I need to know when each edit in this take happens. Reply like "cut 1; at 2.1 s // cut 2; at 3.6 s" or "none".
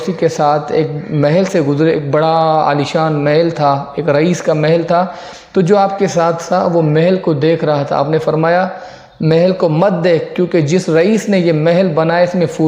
none